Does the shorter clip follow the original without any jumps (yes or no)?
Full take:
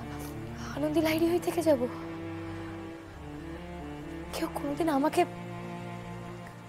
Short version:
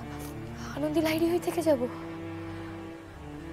yes